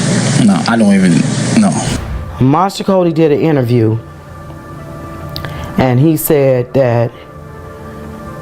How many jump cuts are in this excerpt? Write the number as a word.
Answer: one